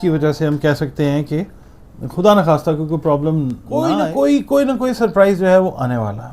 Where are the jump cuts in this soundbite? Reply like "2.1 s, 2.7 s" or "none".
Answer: 3.7 s